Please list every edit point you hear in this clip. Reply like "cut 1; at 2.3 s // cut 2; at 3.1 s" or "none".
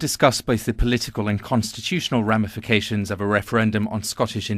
cut 1; at 3.1 s